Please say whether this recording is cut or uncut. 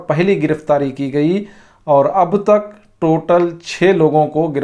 uncut